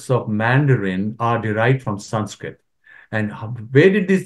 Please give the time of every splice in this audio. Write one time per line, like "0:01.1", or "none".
none